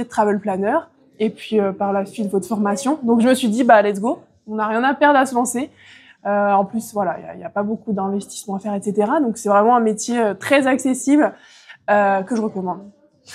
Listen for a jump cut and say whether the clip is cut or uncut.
uncut